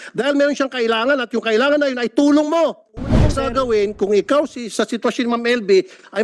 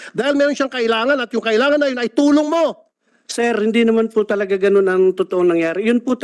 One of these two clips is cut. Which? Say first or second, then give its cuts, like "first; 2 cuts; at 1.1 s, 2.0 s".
first; 1 cut; at 3.3 s